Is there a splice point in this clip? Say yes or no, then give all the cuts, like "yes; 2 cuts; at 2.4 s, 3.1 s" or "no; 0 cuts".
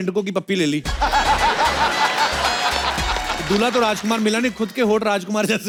no; 0 cuts